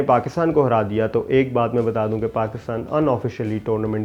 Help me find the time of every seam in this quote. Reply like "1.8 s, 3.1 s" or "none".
none